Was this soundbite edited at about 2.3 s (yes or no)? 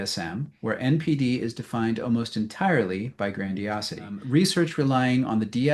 no